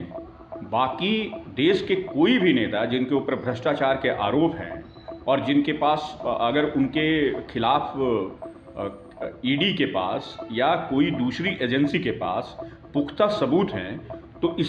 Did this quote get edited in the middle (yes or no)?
no